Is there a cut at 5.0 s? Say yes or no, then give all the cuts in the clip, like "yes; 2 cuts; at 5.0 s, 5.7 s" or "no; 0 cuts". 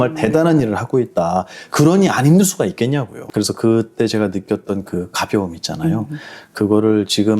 no; 1 cut; at 3.2 s